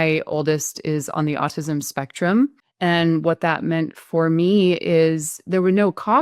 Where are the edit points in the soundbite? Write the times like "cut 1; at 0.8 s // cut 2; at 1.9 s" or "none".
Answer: cut 1; at 2.6 s